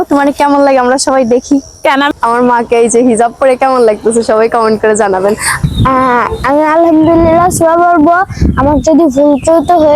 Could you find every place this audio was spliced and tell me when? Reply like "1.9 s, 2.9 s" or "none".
2.1 s, 5.6 s